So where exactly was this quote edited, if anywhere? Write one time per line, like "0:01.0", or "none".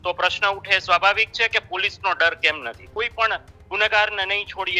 0:02.8

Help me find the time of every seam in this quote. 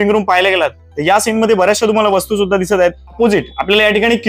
0:03.2

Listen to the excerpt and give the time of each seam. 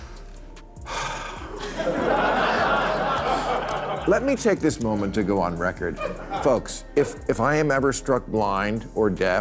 none

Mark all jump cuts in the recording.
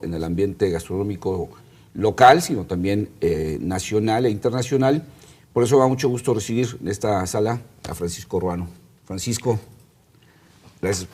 0:06.7

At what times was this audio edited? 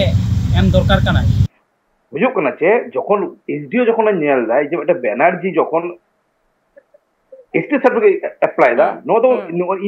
0:01.4

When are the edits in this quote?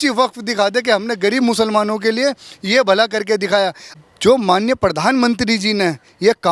0:03.9

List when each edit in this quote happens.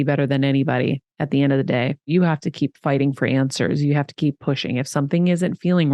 0:02.1

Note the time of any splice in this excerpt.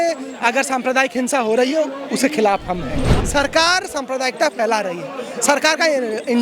0:03.2

